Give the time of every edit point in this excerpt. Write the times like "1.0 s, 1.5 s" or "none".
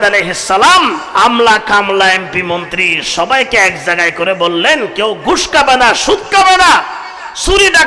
1.0 s

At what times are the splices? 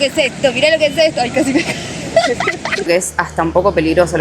2.9 s

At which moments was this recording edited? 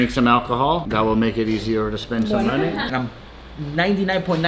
0.9 s, 2.9 s

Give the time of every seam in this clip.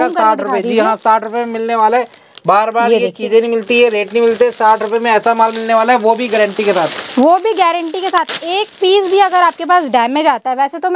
none

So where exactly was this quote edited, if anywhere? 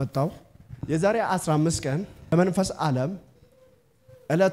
2.3 s

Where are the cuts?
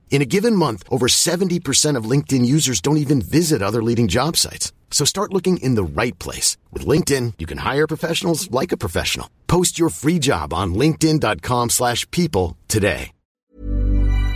13.4 s

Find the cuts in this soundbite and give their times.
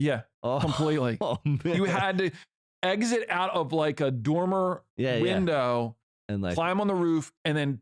1.7 s

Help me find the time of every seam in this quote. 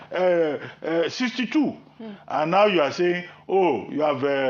none

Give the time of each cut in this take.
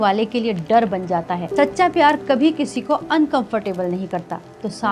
1.4 s

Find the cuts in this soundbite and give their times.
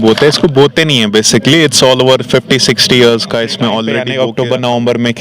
4.0 s

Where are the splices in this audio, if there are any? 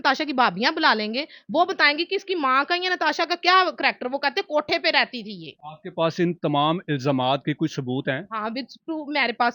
none

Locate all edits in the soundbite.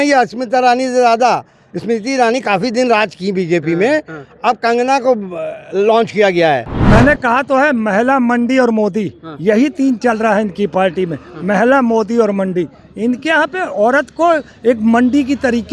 6.7 s

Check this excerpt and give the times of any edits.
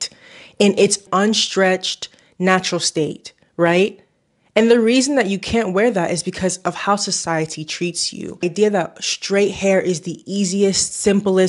8.4 s

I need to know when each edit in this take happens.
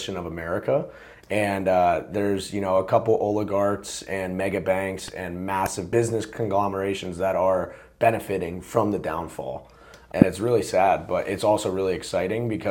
5.8 s, 9.9 s

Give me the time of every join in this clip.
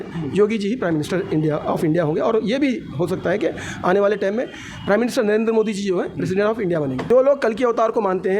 7.0 s

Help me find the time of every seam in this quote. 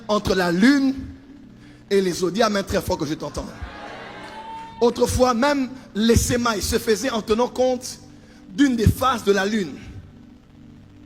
none

